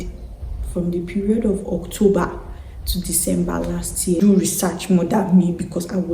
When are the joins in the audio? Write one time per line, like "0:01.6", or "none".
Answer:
0:04.2